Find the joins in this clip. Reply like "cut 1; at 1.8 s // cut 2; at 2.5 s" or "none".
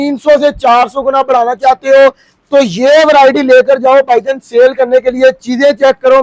none